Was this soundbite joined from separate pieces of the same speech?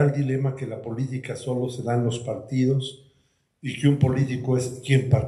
no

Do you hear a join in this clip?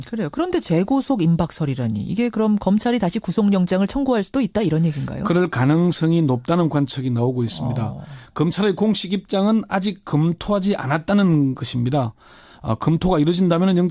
yes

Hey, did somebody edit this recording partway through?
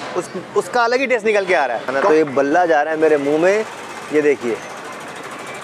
yes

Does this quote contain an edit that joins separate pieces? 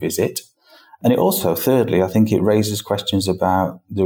yes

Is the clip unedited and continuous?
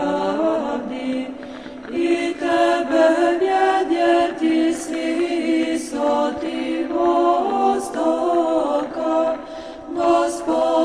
yes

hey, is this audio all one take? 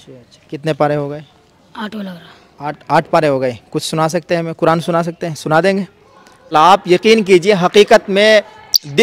no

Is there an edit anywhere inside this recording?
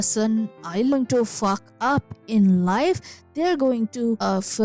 yes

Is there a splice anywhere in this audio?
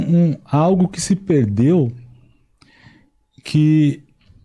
no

